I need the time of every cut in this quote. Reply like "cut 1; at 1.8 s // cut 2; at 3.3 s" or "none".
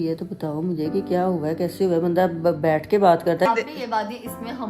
cut 1; at 3.5 s